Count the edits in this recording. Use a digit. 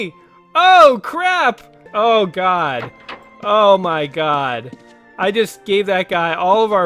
1